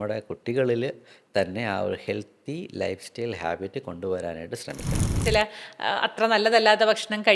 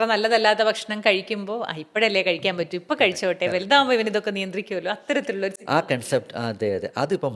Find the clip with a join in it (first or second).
first